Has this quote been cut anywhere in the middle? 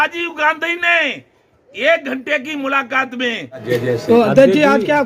yes; 1 cut; at 3.6 s

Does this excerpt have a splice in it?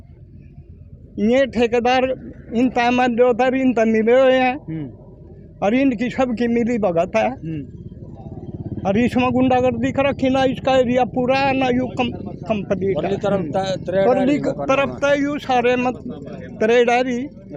no; 0 cuts

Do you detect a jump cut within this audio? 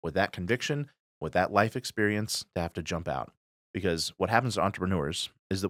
no; 0 cuts

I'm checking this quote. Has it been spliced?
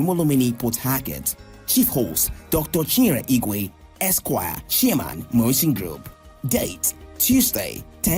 no; 0 cuts

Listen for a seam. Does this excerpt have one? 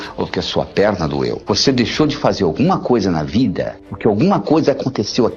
yes; 1 cut; at 1.4 s

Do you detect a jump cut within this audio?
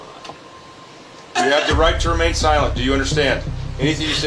no; 0 cuts

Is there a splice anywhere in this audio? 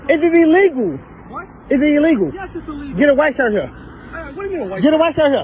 no; 0 cuts

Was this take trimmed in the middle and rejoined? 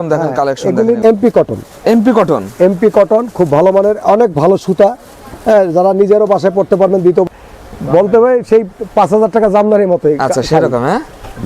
yes; 2 cuts; at 1.0 s, 7.3 s

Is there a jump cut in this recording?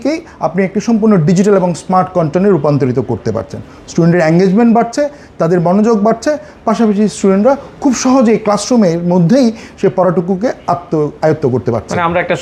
no; 0 cuts

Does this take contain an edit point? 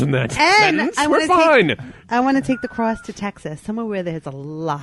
no; 0 cuts

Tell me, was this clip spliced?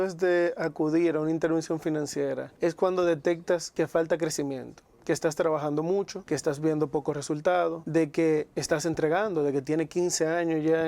yes; 4 cuts; at 2.5 s, 3.7 s, 6.2 s, 7.8 s

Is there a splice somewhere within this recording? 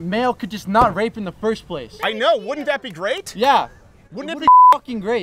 no; 0 cuts

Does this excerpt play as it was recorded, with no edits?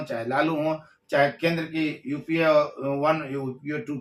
yes; 0 cuts

